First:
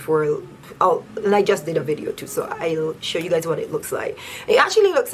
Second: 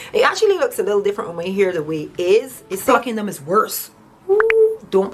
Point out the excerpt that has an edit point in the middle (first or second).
second